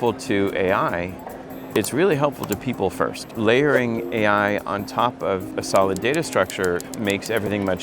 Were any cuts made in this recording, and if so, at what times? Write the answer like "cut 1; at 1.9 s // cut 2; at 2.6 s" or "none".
cut 1; at 3.2 s // cut 2; at 5.5 s